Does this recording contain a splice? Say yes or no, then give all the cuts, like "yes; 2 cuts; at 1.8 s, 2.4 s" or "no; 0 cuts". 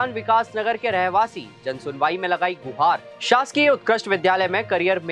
yes; 1 cut; at 3.1 s